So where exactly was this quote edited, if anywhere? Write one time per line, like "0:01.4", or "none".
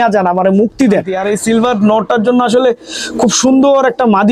0:01.1